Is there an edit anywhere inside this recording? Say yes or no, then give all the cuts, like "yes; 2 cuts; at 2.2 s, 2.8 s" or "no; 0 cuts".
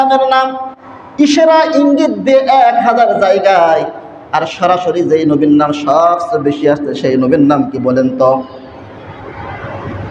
no; 0 cuts